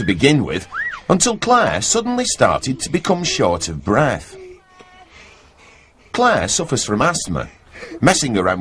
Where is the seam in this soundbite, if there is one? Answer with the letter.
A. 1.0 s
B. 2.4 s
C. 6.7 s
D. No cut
C